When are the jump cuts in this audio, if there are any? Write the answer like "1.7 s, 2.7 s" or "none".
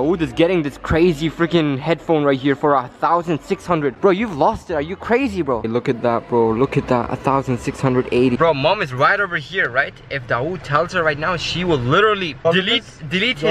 5.6 s, 8.4 s